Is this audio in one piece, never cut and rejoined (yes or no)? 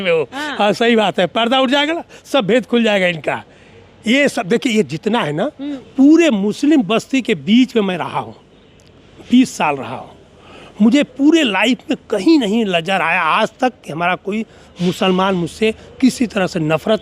no